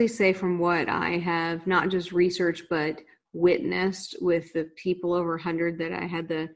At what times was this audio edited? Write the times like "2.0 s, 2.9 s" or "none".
none